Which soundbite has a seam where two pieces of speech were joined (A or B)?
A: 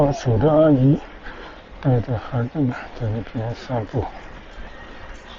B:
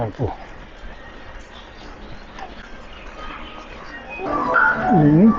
B